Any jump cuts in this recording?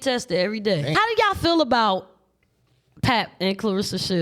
yes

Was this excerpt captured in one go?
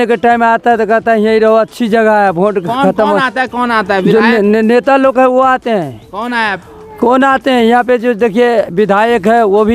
yes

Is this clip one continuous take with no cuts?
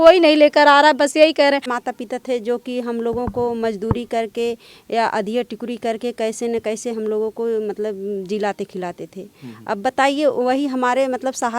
no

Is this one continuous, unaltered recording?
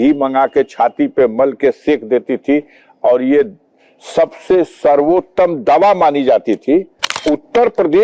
no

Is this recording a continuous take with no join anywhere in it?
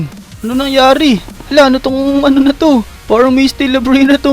no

